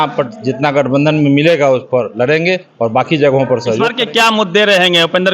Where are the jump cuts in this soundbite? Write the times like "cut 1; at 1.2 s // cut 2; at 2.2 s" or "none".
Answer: cut 1; at 3.9 s